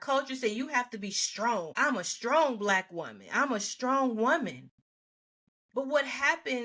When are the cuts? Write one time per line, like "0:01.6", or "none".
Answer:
0:01.7